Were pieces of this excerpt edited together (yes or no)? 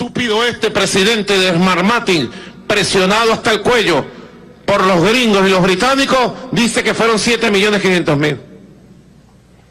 no